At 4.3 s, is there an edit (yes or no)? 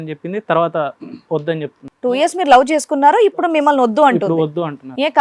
no